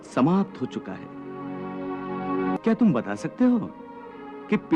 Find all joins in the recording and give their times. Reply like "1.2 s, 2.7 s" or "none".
2.6 s